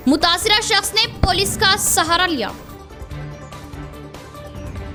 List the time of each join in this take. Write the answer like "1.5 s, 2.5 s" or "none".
none